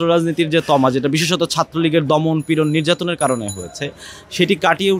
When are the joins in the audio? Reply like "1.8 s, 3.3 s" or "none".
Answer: none